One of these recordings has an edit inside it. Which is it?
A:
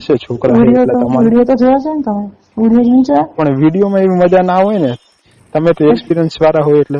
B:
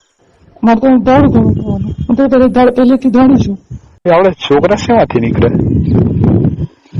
B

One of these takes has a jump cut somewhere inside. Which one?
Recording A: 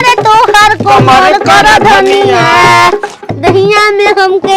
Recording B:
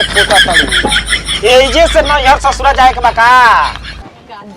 A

